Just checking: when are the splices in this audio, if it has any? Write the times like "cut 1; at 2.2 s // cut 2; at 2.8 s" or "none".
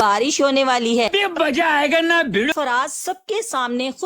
cut 1; at 2.5 s